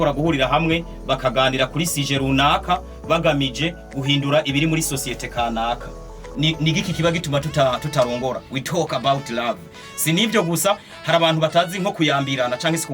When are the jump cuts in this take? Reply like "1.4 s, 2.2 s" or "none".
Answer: 6.2 s